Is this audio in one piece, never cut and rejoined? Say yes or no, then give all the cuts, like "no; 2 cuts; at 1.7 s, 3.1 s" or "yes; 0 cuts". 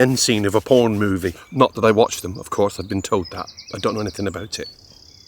no; 1 cut; at 1.4 s